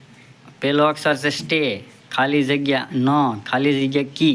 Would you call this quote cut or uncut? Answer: uncut